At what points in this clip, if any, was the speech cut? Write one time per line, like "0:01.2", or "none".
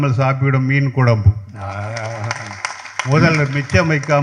none